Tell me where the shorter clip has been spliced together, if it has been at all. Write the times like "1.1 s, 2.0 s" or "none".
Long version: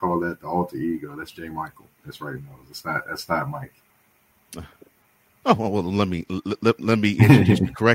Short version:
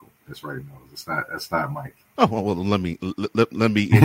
2.0 s